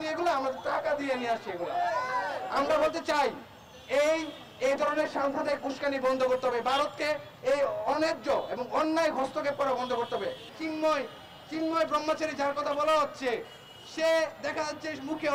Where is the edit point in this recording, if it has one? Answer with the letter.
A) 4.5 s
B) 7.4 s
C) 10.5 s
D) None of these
C